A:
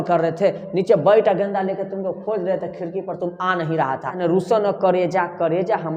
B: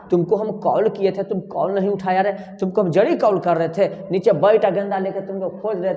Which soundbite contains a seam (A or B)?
A